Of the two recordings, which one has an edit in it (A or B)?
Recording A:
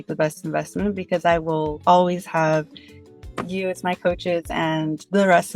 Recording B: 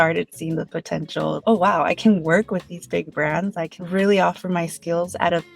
B